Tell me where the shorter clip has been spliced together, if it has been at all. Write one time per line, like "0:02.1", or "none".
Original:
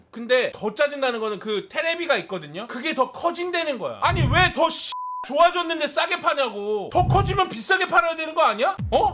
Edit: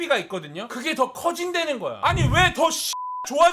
none